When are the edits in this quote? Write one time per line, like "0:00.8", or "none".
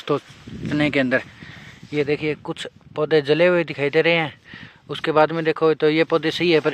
none